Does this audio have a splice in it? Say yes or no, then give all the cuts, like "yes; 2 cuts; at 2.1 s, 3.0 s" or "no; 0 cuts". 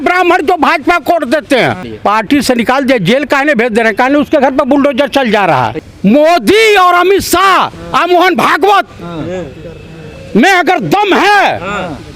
yes; 2 cuts; at 1.9 s, 5.8 s